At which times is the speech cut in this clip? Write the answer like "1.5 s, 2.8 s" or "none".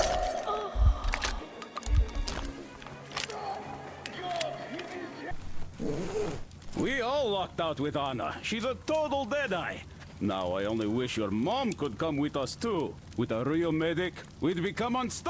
5.3 s